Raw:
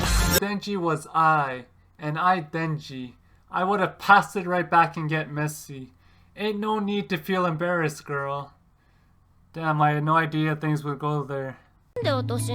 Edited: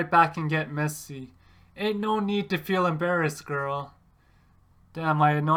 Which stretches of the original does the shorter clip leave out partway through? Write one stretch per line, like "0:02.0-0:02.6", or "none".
none